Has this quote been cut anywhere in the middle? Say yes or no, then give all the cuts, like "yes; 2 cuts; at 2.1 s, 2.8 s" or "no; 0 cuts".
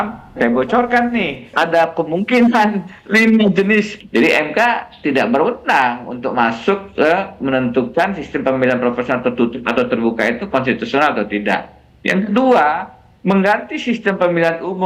yes; 2 cuts; at 1.5 s, 4.0 s